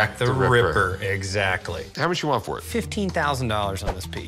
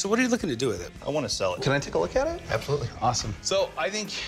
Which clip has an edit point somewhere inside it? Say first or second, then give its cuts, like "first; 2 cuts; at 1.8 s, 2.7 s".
second; 2 cuts; at 1.6 s, 3.3 s